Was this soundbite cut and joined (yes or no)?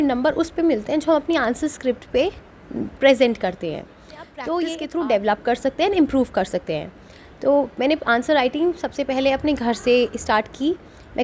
yes